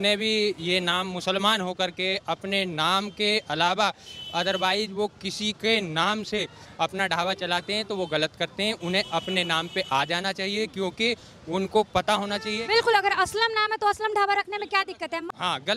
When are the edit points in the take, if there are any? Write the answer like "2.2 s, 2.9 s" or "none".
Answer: none